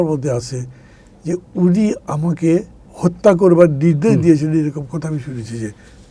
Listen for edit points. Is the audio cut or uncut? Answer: cut